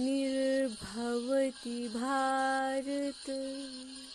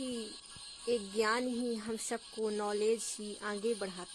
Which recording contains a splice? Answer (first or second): first